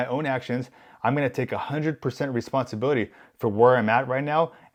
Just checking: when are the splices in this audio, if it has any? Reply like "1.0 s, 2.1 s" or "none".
none